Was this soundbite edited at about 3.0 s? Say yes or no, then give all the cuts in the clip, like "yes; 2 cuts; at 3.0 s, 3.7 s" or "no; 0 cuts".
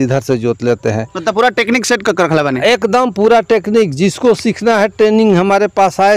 no; 0 cuts